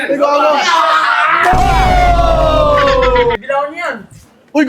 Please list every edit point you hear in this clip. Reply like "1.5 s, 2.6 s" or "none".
3.3 s

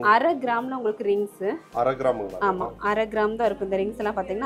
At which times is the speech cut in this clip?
none

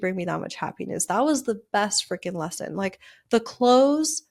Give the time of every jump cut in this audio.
none

